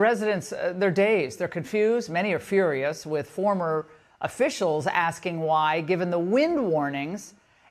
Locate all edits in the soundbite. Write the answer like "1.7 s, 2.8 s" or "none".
none